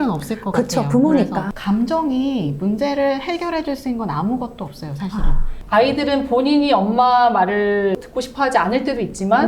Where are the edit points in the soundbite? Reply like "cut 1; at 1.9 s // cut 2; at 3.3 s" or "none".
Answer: cut 1; at 1.5 s // cut 2; at 5.6 s // cut 3; at 8.0 s